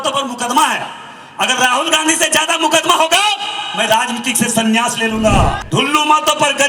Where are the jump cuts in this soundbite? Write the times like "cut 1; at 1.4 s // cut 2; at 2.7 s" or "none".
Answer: cut 1; at 5.6 s